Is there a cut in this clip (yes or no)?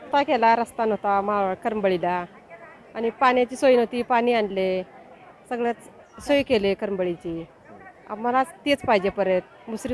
no